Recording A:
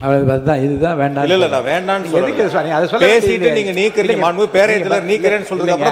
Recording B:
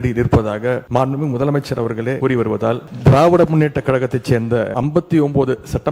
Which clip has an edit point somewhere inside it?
B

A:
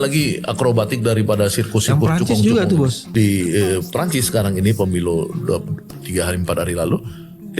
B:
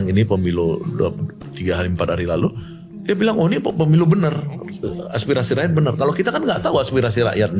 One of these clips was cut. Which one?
A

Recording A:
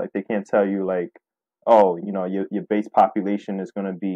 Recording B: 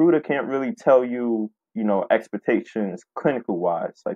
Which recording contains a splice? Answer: B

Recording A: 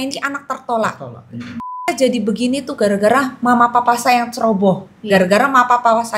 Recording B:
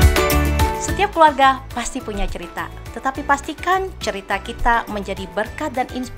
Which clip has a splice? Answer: A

